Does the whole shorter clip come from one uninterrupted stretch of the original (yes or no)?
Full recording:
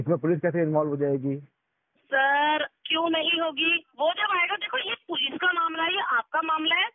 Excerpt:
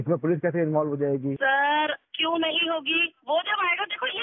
no